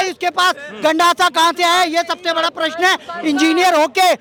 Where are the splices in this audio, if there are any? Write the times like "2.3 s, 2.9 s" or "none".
none